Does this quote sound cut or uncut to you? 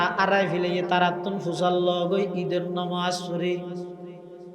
uncut